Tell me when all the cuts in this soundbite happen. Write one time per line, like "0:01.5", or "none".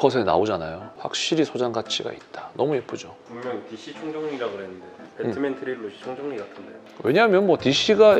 0:03.2